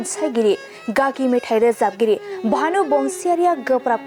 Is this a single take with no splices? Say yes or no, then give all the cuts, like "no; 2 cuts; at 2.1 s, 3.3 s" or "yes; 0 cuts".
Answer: yes; 0 cuts